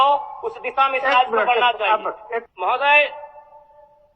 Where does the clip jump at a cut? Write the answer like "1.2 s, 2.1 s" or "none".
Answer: 2.5 s